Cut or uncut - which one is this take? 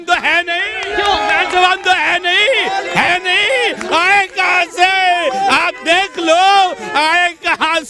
uncut